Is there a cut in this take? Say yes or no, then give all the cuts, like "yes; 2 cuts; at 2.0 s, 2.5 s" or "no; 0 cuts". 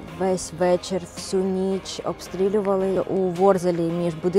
yes; 1 cut; at 3.0 s